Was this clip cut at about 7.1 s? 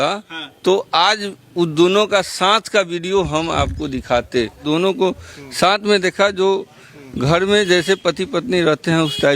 no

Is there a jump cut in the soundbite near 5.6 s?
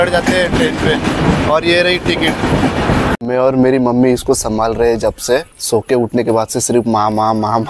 yes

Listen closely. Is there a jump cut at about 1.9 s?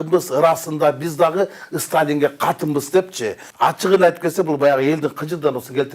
no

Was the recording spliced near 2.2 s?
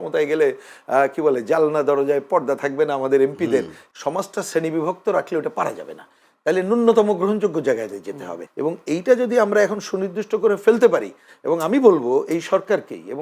no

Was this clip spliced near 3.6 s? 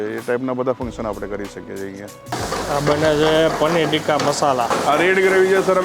no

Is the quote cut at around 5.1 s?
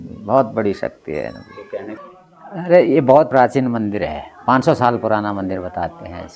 no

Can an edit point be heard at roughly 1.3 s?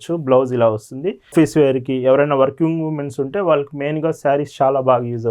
yes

